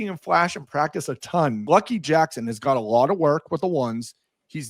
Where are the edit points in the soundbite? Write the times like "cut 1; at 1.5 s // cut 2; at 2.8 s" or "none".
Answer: cut 1; at 1.7 s